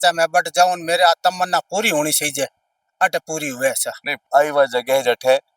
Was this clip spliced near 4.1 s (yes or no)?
yes